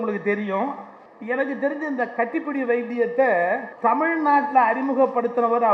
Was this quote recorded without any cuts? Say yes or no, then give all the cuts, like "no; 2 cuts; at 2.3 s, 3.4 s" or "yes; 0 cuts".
no; 1 cut; at 3.7 s